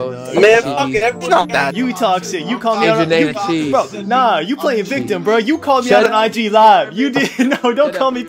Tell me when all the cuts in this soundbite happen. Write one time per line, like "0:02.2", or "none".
none